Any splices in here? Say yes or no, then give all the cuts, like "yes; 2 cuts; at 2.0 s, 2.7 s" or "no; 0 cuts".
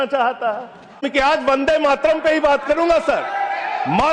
yes; 1 cut; at 1.1 s